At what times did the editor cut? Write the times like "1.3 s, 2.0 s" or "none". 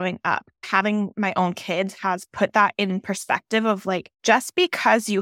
1.0 s, 4.1 s